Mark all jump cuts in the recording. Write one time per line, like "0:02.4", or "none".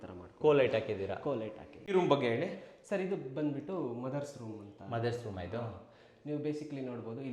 0:01.8